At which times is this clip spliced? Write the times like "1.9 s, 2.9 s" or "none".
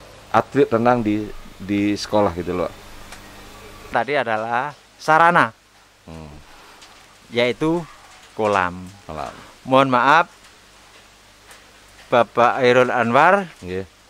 3.9 s